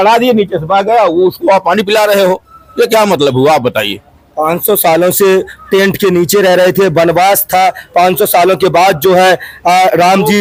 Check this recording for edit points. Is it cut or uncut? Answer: uncut